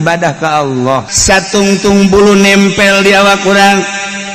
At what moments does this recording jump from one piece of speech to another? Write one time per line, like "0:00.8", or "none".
0:01.1